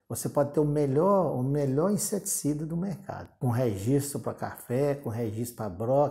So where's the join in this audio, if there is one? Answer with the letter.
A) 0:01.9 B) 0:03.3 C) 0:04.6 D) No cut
B